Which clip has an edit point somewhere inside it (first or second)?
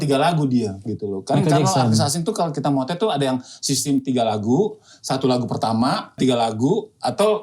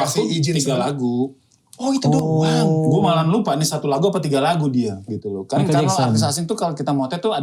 first